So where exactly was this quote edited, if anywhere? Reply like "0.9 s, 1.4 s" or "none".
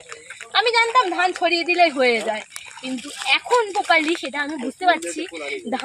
none

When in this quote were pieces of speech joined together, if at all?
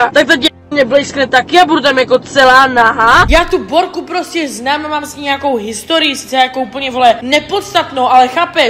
3.3 s

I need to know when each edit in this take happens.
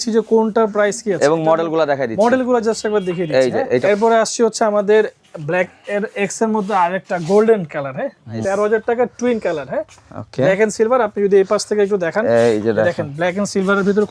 3.8 s, 8.4 s

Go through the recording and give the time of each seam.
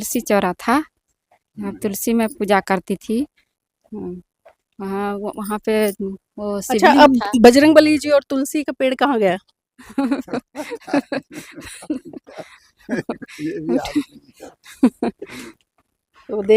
none

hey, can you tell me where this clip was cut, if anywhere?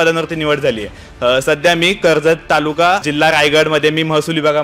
3.1 s

